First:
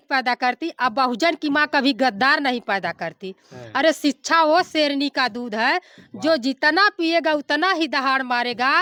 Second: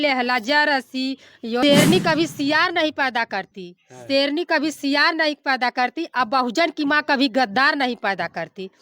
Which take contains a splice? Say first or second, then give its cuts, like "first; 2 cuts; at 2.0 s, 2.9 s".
second; 1 cut; at 1.6 s